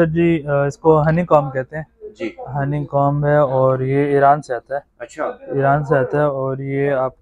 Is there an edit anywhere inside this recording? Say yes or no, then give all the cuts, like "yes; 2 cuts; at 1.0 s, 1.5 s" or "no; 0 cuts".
no; 0 cuts